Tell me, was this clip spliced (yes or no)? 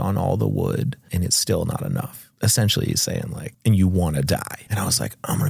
yes